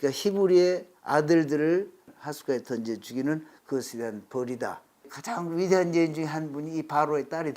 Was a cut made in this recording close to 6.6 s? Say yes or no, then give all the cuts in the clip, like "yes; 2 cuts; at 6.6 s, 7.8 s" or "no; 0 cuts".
no; 2 cuts; at 2.1 s, 5.1 s